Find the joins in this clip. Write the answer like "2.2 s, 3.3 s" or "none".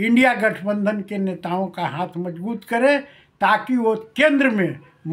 none